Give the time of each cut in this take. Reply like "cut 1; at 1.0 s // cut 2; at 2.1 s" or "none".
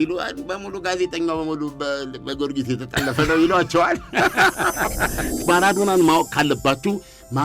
cut 1; at 5.4 s